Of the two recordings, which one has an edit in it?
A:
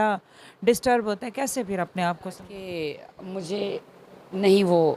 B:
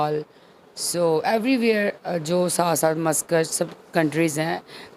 A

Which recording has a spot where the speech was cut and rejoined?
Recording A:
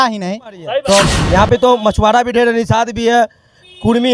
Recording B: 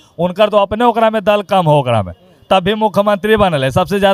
A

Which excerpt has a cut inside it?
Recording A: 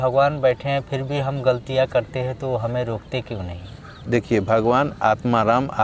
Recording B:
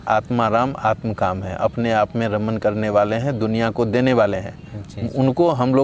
A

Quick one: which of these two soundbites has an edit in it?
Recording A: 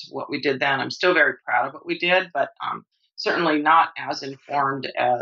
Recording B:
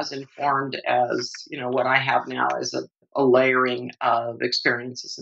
B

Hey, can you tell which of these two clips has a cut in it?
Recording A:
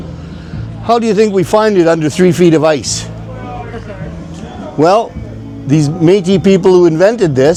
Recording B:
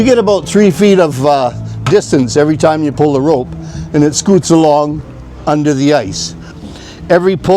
B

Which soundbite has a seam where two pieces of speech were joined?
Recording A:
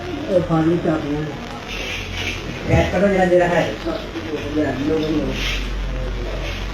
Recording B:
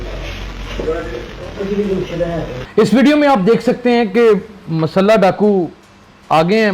B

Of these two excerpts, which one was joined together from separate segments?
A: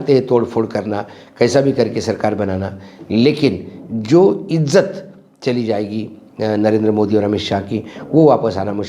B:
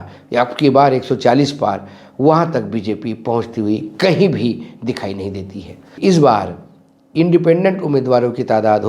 B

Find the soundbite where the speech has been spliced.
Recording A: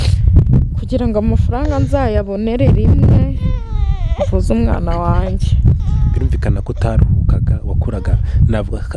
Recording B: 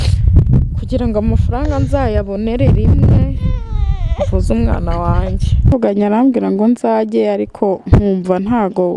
B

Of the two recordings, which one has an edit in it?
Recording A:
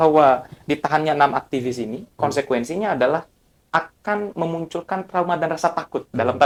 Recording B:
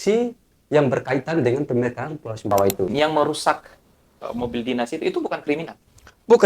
B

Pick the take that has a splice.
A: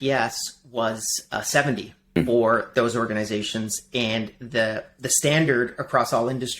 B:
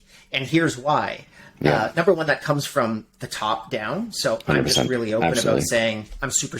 A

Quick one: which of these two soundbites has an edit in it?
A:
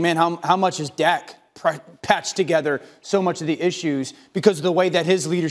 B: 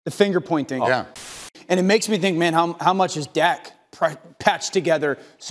B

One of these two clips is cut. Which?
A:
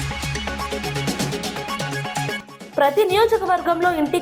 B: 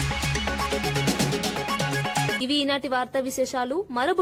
A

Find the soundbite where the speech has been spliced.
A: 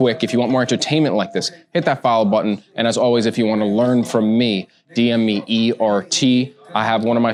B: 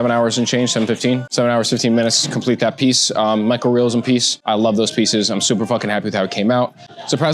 B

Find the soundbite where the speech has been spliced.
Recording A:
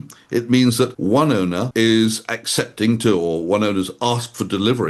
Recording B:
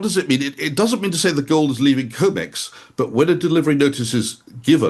A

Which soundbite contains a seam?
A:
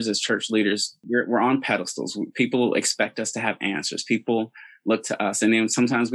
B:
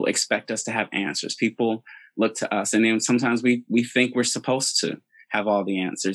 A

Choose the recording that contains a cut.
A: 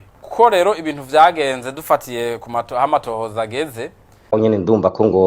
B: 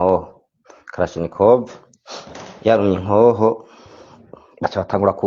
A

